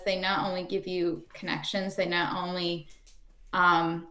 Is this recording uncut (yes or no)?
yes